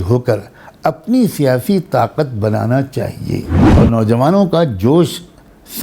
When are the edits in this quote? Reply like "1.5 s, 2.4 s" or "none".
3.6 s